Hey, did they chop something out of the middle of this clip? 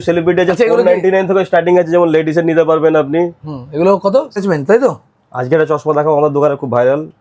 yes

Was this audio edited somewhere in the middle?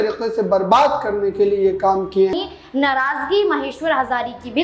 yes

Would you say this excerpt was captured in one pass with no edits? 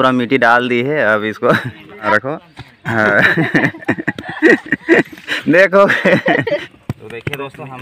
no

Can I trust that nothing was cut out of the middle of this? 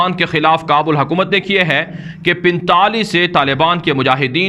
yes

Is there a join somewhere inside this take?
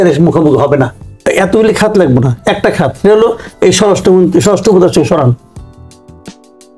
yes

